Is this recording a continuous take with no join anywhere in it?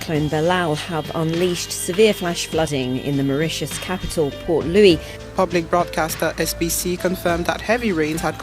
no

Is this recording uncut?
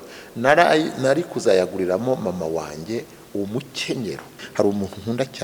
no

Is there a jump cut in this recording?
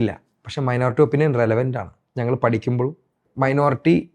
no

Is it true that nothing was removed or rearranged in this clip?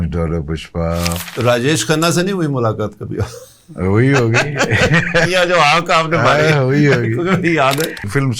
yes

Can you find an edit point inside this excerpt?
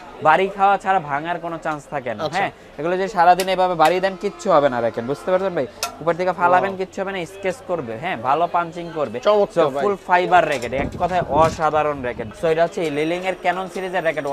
yes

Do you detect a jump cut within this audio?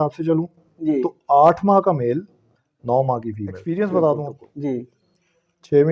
yes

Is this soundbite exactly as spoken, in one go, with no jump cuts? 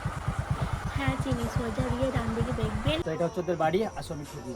no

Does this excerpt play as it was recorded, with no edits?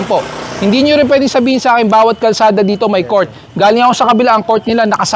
yes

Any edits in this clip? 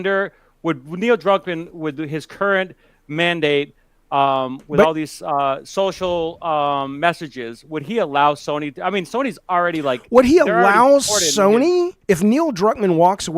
yes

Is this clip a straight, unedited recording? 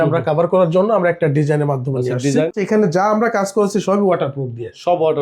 no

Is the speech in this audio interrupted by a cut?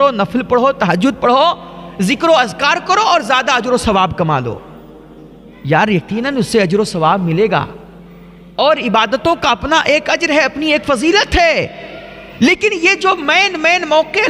no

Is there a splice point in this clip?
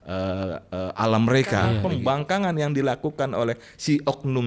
yes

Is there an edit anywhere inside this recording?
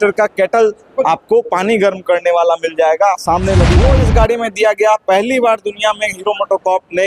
yes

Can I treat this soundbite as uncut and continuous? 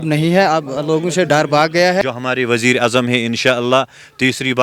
no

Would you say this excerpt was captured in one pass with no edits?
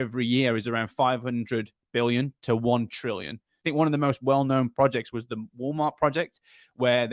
no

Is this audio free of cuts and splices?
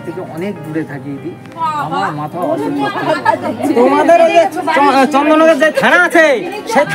yes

